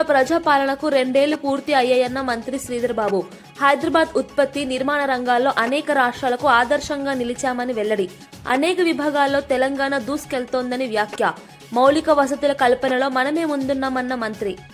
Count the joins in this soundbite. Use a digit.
0